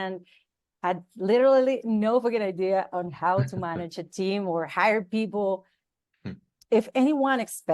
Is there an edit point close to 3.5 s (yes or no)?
no